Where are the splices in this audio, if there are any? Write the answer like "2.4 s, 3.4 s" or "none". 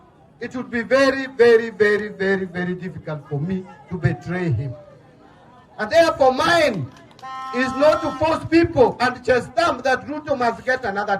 none